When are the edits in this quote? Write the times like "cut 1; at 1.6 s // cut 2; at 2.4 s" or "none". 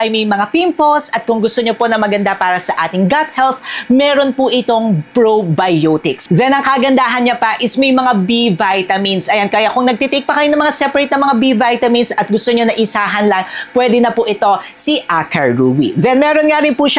none

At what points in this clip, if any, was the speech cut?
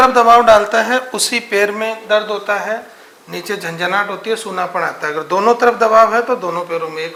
none

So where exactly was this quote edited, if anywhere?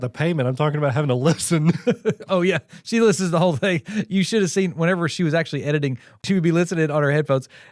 cut 1; at 6.2 s

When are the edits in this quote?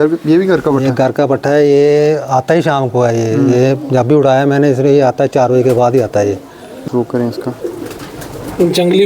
cut 1; at 6.9 s

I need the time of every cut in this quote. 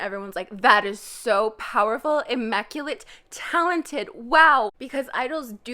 cut 1; at 4.8 s

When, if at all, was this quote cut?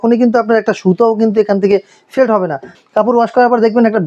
cut 1; at 2.7 s

